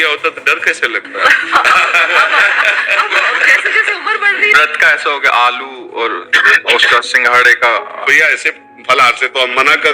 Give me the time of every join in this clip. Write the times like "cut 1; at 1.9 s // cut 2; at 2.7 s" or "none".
cut 1; at 4.5 s // cut 2; at 8.1 s